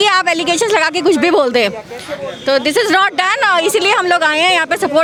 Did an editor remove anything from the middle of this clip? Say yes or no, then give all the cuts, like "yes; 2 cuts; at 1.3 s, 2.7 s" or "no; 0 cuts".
no; 0 cuts